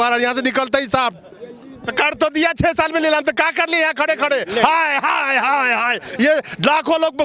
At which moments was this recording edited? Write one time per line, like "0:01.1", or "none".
0:01.4